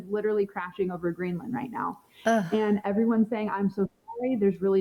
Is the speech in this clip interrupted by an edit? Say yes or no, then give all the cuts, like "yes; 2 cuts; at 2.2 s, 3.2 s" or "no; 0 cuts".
no; 0 cuts